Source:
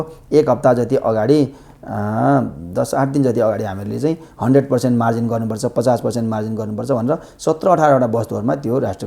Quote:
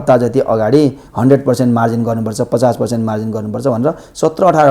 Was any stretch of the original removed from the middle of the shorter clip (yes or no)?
yes